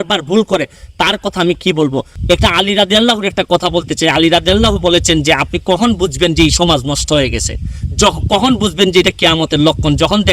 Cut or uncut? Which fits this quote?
cut